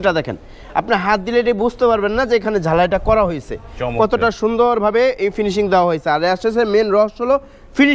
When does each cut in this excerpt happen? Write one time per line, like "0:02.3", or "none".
none